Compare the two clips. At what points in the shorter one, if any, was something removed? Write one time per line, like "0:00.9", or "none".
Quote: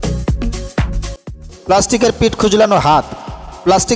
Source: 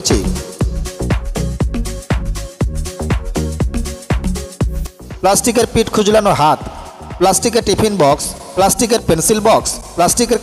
0:01.2